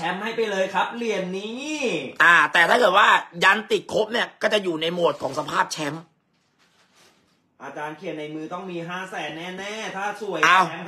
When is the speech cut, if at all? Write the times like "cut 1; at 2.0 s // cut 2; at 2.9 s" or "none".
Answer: none